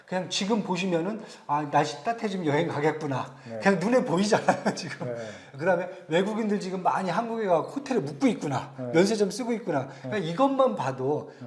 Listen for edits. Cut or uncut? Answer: uncut